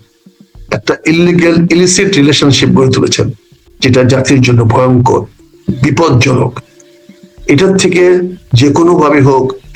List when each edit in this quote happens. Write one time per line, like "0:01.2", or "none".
none